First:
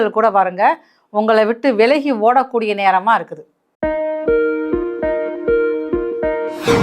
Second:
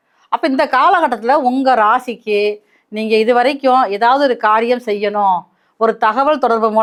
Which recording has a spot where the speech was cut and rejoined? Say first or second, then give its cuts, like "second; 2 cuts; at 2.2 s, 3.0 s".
first; 1 cut; at 3.7 s